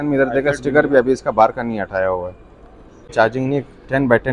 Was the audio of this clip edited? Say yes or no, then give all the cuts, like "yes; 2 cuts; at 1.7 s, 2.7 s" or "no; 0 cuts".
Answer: yes; 1 cut; at 3.1 s